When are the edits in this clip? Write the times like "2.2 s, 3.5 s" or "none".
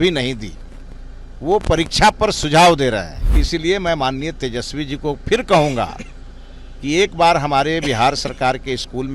3.2 s

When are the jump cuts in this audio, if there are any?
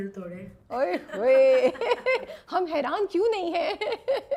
none

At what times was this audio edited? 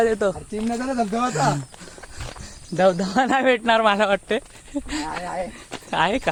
none

